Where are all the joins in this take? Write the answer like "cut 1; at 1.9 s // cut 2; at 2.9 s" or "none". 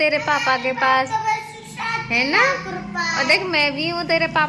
none